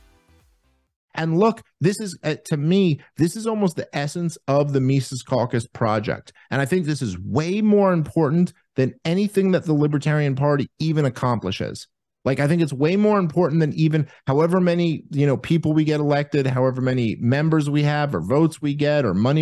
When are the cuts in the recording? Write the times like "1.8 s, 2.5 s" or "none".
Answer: 1.0 s

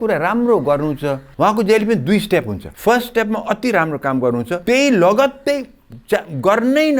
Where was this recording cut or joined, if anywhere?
1.2 s, 2.6 s, 4.6 s

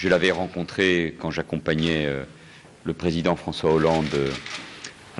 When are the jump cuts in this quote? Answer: 3.1 s

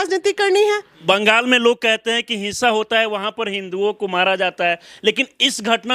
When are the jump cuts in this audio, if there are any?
0.9 s

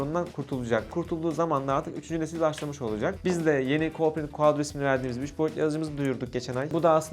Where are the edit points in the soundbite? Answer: 0.9 s, 3.2 s

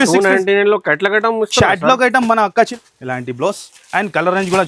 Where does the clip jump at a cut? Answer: 2.7 s

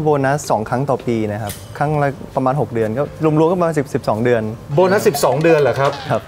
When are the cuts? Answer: none

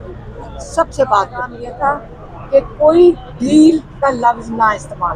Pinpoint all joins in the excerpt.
1.6 s

